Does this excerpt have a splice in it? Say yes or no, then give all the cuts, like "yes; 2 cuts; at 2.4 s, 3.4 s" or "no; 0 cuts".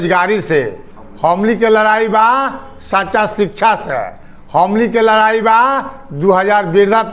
no; 0 cuts